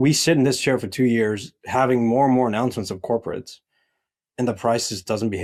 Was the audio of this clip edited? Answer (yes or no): no